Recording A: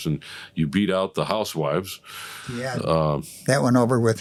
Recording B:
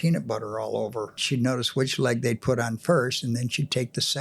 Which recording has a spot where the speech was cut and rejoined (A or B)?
B